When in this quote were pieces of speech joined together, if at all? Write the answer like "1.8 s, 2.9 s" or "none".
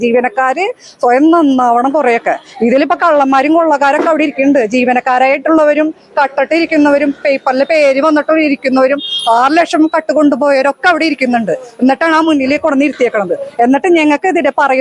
none